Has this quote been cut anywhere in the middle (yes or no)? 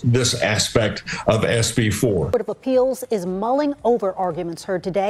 yes